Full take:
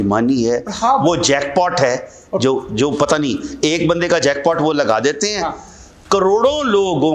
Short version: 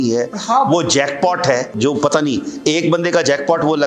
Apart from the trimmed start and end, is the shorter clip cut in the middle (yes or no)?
yes